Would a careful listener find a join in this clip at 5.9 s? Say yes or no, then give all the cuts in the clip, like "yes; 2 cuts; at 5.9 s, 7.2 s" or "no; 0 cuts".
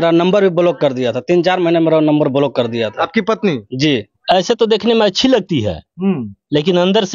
no; 1 cut; at 4.1 s